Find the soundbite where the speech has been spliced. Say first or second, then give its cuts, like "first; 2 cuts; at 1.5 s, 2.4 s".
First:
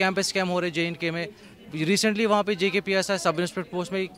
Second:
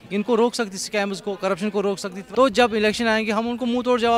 second; 1 cut; at 2.2 s